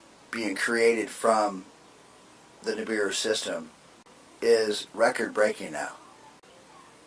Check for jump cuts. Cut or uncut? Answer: cut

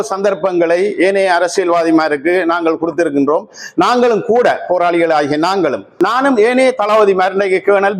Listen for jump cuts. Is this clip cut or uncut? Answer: cut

